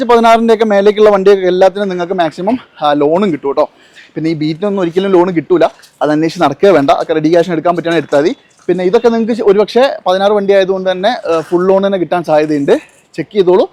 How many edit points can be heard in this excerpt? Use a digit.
0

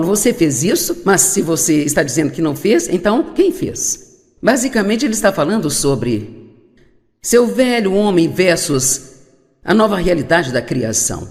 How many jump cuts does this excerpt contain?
0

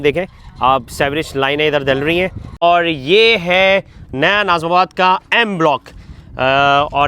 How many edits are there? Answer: 1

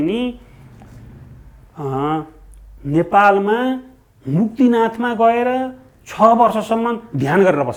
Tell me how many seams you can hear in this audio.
0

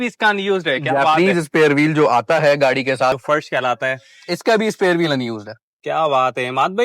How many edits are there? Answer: 1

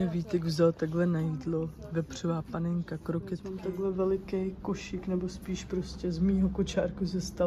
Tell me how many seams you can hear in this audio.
1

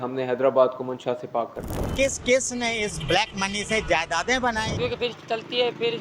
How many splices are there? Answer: 2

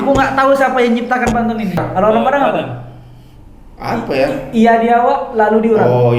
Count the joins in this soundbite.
1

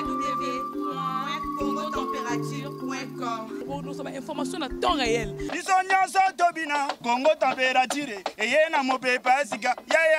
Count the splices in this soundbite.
0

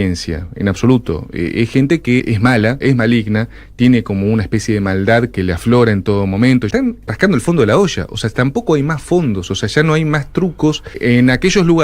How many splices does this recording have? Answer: 3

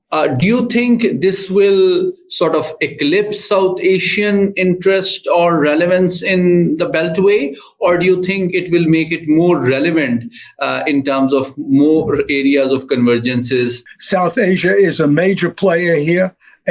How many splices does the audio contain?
1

